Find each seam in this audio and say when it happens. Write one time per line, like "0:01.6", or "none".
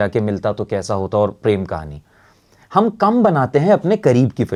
none